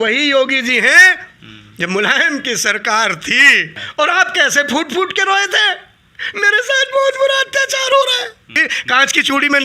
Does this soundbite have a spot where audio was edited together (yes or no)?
yes